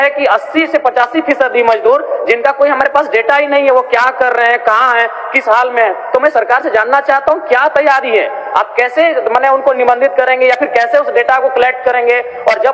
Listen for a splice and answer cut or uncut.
uncut